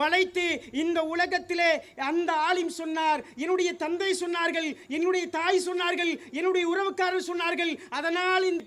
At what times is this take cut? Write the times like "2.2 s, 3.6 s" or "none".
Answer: none